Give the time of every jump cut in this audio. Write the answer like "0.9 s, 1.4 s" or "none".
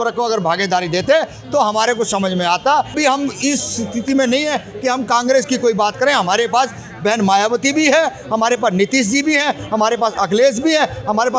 2.9 s